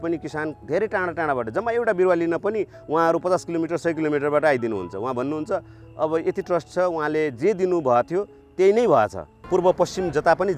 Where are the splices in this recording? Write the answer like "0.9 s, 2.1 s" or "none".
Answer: 9.3 s